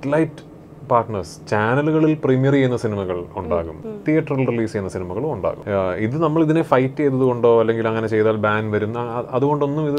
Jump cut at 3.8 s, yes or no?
yes